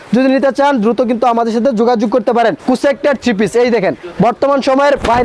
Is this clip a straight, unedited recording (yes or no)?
no